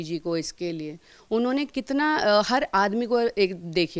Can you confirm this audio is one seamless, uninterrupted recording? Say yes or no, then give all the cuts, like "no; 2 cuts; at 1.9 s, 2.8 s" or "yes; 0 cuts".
yes; 0 cuts